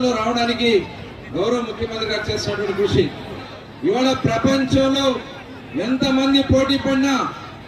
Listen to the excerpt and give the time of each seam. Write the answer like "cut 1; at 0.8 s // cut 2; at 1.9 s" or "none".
cut 1; at 3.4 s